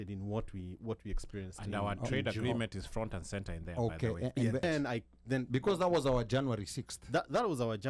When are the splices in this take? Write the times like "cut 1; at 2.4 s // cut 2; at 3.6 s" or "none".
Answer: cut 1; at 4.6 s